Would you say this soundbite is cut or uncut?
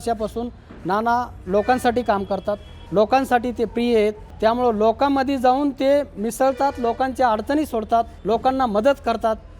cut